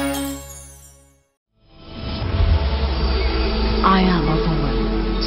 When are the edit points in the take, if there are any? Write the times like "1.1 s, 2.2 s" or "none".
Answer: 1.2 s

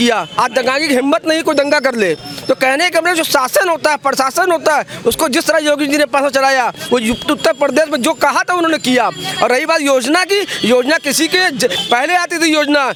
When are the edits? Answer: none

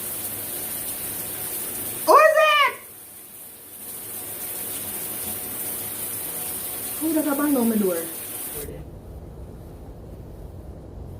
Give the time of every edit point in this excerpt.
8.6 s

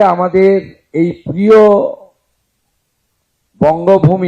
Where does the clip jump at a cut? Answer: none

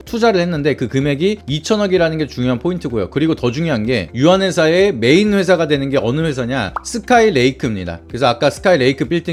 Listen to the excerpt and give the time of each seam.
none

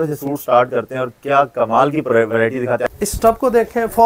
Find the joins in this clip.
2.8 s

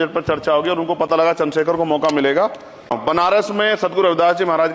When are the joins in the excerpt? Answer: 3.0 s

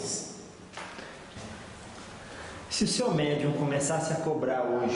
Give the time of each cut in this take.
1.4 s

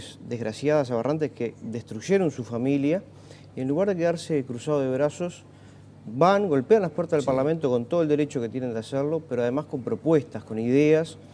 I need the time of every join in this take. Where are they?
none

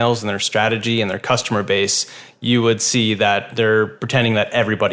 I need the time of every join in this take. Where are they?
3.5 s

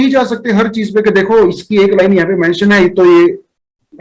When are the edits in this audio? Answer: none

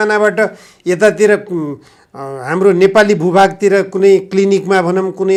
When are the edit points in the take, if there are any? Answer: none

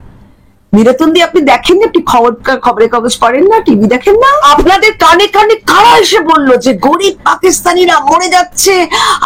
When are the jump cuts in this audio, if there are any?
4.4 s

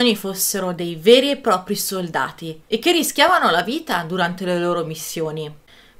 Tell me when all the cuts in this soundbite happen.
2.5 s

